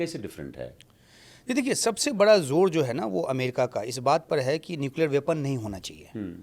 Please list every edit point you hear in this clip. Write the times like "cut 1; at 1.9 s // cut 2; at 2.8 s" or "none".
none